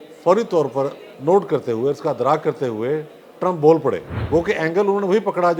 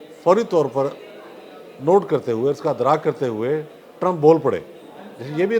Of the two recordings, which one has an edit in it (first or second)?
first